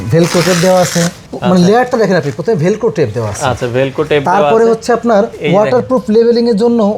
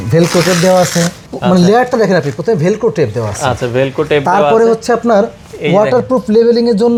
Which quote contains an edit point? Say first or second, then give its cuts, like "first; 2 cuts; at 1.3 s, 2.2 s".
first; 1 cut; at 5.4 s